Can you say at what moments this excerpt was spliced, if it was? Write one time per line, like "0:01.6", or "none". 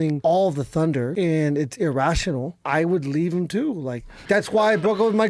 0:01.1
0:02.6
0:04.1